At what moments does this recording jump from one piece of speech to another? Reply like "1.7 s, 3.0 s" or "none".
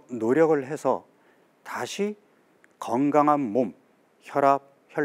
none